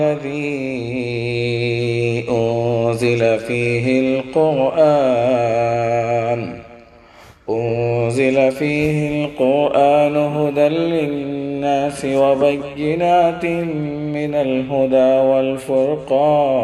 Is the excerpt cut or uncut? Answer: uncut